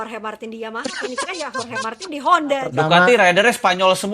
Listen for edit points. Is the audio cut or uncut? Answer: cut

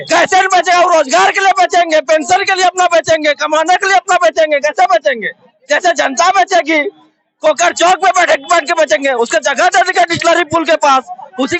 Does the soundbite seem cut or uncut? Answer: uncut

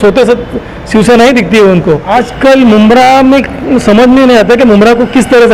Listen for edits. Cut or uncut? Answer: cut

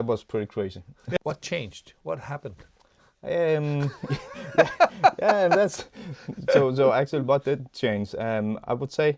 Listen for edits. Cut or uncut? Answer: cut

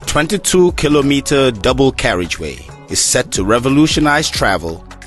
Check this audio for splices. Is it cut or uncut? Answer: uncut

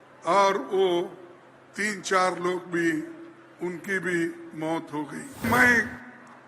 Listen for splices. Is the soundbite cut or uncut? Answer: cut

